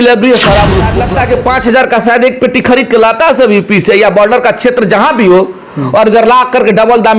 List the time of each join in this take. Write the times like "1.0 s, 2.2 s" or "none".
1.0 s